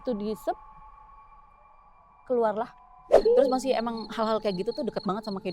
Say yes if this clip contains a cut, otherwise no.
yes